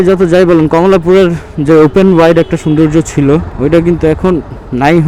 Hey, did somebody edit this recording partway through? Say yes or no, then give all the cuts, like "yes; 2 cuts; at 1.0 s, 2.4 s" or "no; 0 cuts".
no; 0 cuts